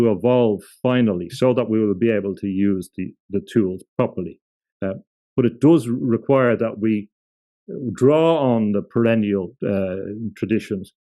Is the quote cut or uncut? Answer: uncut